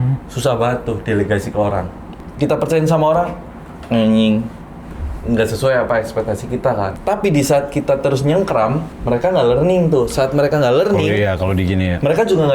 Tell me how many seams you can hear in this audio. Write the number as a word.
three